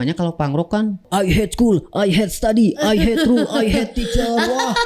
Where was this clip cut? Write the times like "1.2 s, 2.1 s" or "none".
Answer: 1.0 s

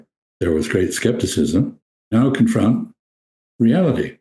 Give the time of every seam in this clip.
2.1 s

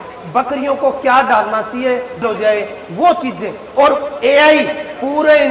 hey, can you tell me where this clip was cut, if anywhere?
2.2 s

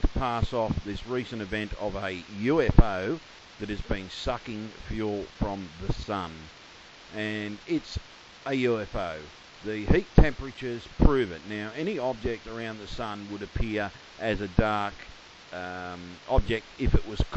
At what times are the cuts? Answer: 7.6 s

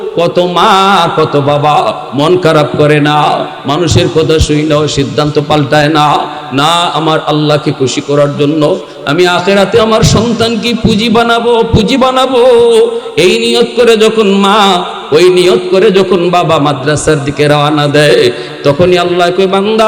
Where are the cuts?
18.5 s

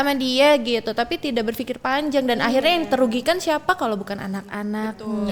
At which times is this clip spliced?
none

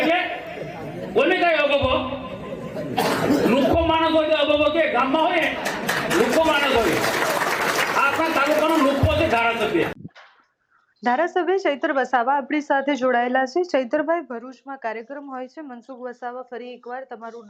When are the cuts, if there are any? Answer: none

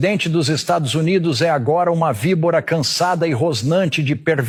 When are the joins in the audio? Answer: none

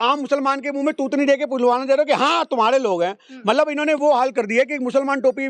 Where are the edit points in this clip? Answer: none

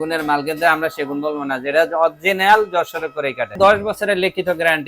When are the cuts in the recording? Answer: 3.5 s

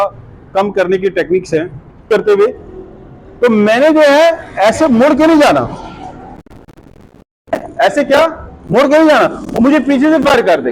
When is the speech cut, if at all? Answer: 2.0 s

